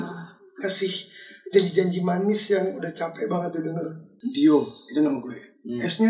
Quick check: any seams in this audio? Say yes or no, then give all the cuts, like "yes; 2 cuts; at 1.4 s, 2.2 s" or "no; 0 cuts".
yes; 1 cut; at 4.1 s